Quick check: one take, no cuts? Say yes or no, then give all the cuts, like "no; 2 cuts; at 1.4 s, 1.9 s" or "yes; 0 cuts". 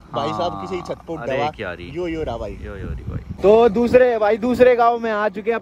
no; 1 cut; at 3.3 s